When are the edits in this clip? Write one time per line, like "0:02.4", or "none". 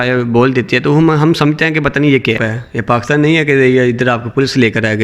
0:02.5